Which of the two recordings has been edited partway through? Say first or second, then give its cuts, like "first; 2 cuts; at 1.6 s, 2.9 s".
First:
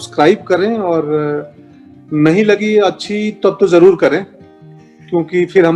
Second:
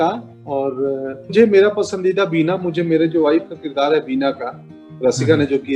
second; 1 cut; at 1.3 s